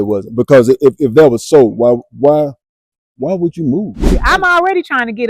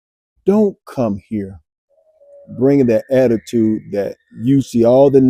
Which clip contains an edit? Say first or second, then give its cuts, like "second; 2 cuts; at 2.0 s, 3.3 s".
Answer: first; 1 cut; at 4.1 s